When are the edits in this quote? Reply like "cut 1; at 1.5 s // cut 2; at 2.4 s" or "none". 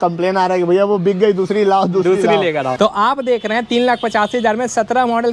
cut 1; at 2.7 s